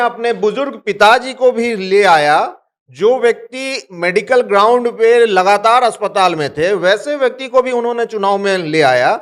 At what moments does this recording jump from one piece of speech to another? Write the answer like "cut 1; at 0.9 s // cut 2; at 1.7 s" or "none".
none